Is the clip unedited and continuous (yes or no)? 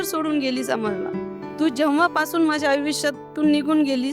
no